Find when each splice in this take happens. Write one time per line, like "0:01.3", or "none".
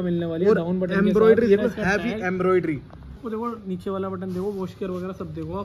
0:03.2